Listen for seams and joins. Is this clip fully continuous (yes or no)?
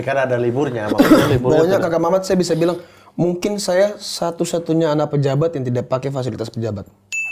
yes